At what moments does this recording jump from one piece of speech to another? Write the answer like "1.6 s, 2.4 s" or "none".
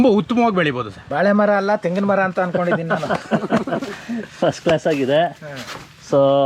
1.0 s